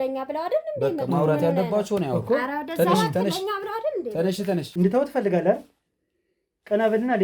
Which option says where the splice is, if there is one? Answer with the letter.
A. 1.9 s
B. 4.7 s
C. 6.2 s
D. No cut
B